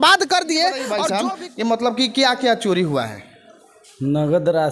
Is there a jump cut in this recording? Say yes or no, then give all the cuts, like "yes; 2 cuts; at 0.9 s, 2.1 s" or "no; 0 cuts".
yes; 1 cut; at 0.9 s